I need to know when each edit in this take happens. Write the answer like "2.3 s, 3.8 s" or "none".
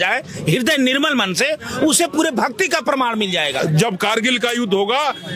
3.6 s